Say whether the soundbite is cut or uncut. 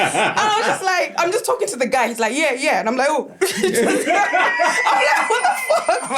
uncut